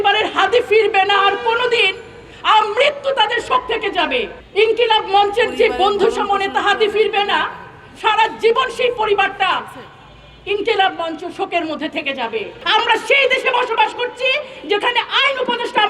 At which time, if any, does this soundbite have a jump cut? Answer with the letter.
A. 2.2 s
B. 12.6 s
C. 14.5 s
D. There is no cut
B